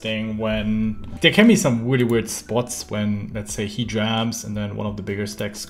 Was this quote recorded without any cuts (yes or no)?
no